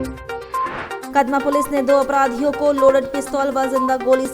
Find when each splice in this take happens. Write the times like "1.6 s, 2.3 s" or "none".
1.0 s